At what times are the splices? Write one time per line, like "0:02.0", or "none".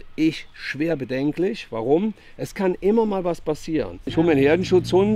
0:04.1